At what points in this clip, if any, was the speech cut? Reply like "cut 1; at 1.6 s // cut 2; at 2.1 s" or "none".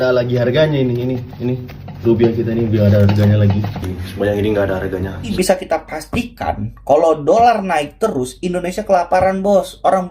cut 1; at 5.3 s